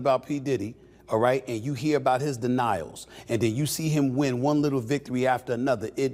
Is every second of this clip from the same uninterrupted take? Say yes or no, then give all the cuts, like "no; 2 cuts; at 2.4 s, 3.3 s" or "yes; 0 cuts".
yes; 0 cuts